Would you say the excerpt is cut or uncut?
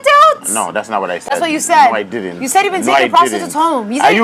uncut